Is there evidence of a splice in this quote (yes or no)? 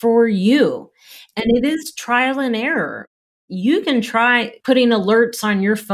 yes